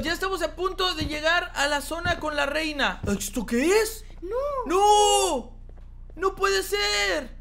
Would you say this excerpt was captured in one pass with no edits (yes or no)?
yes